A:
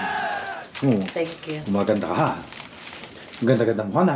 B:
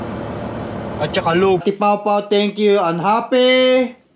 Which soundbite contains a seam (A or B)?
B